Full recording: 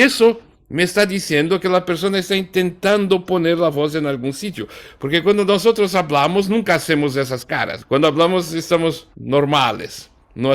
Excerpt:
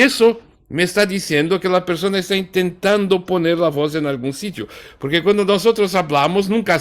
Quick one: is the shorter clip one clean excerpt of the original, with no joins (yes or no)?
yes